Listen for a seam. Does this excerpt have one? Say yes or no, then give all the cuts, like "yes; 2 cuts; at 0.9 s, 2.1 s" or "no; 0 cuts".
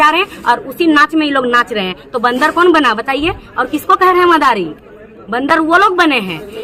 no; 0 cuts